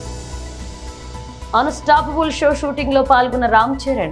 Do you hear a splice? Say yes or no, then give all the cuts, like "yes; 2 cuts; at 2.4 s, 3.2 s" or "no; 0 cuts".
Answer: no; 0 cuts